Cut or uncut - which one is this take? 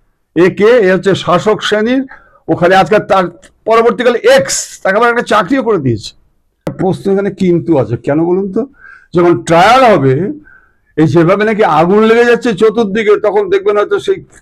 cut